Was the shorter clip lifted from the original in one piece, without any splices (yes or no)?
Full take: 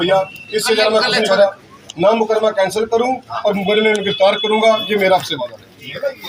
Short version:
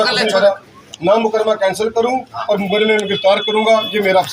yes